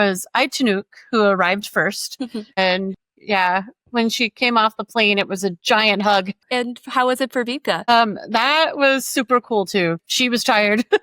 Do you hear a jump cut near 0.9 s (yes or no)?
no